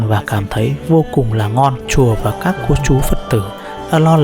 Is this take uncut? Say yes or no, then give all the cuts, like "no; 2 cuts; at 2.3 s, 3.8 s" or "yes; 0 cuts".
no; 1 cut; at 1.9 s